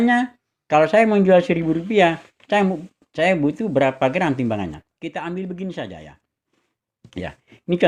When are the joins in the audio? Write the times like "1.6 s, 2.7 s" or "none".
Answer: none